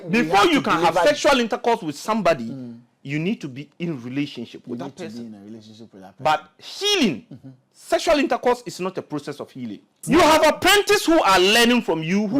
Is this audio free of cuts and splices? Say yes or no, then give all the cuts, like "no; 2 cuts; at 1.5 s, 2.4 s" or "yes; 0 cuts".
no; 1 cut; at 10.0 s